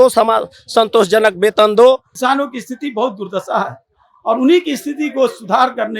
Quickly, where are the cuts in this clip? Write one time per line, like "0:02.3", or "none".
0:02.1